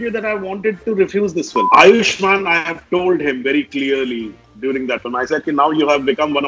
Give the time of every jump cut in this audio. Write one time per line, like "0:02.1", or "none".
0:01.7

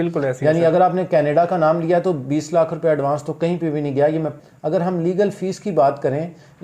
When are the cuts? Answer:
0:04.3

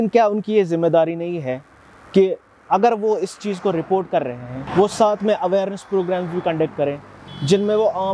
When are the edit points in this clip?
none

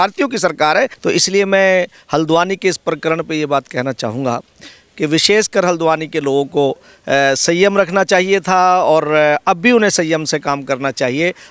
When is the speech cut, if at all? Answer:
0:00.9

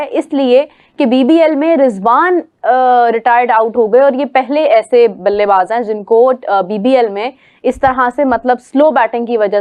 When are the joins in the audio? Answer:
none

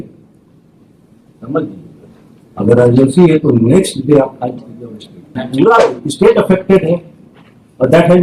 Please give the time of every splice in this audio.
0:05.4

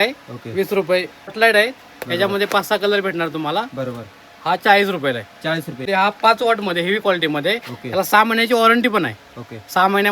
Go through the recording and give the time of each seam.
0:01.3
0:05.8

